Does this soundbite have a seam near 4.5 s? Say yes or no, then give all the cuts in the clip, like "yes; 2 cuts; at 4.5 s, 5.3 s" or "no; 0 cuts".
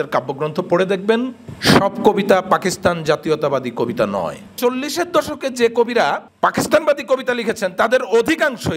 yes; 3 cuts; at 1.4 s, 4.5 s, 6.3 s